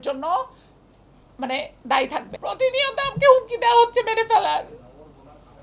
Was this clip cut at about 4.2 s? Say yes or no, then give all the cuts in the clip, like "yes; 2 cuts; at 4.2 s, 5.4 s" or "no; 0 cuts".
no; 1 cut; at 2.3 s